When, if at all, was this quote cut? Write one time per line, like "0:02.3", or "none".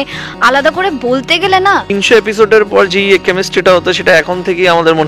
0:01.9